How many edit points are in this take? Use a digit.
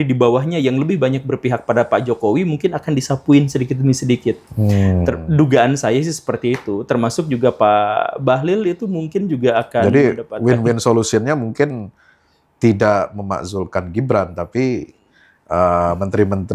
0